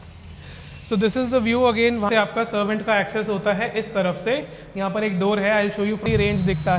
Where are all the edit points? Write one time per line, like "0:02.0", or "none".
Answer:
0:02.1
0:06.0